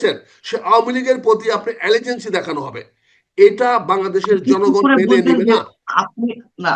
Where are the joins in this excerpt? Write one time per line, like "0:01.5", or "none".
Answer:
none